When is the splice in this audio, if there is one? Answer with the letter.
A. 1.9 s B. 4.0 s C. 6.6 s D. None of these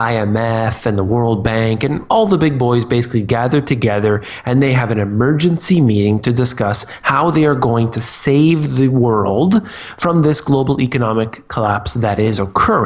D